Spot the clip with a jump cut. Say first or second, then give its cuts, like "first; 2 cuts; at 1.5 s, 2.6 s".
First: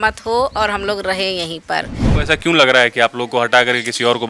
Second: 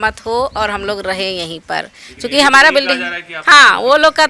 first; 1 cut; at 2.0 s